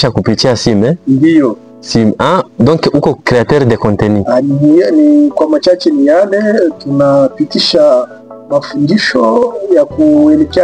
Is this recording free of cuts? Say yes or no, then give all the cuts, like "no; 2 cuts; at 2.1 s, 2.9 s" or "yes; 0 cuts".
yes; 0 cuts